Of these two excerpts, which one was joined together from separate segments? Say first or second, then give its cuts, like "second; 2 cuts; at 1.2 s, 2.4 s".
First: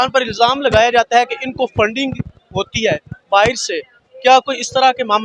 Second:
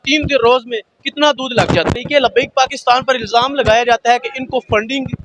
second; 1 cut; at 2.0 s